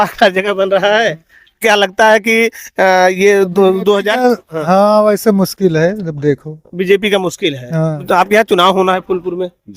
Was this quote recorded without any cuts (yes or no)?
no